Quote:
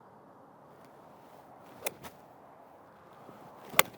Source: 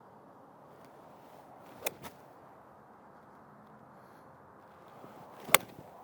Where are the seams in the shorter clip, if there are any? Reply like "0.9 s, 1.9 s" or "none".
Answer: 2.7 s